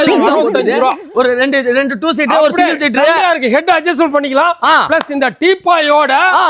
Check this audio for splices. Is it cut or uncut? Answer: uncut